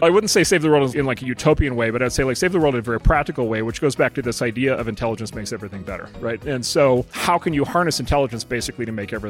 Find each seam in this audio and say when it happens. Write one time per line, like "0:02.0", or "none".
0:00.9
0:06.4
0:07.1